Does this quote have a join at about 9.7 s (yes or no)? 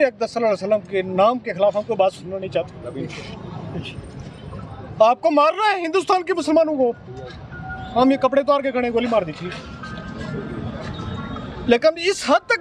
no